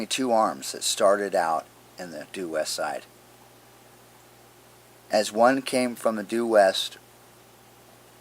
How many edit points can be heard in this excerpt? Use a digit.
1